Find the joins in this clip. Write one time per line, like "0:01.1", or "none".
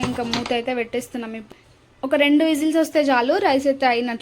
0:01.5